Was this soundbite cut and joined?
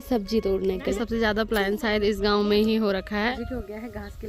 yes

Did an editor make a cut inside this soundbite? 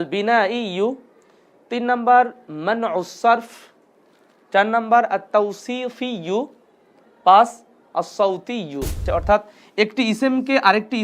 yes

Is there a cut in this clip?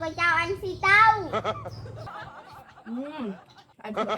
yes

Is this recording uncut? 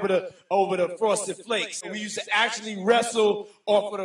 no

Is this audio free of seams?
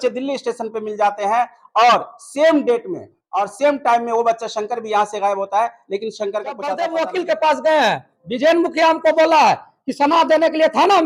no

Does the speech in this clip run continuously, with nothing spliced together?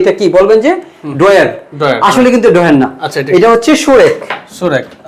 yes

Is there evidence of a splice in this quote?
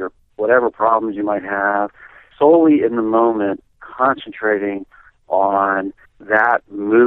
yes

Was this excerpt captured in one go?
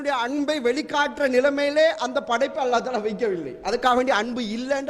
yes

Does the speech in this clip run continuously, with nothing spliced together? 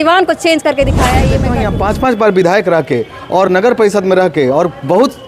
no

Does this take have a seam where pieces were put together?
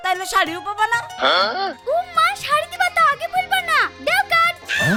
no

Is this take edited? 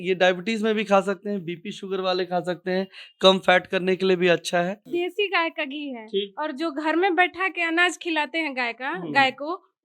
yes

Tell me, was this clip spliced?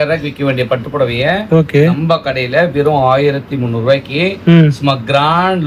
no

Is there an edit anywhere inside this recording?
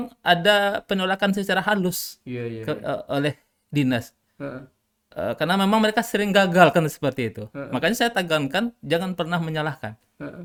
no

